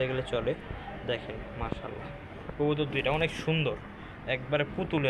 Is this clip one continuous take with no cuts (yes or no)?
yes